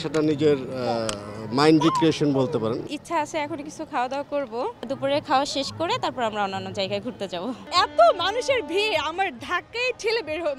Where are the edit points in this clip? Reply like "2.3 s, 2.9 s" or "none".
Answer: 2.9 s, 4.9 s, 7.6 s